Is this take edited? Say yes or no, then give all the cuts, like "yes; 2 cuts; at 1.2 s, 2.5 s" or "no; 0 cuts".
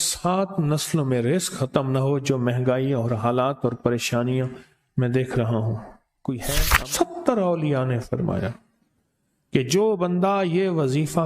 yes; 1 cut; at 6.7 s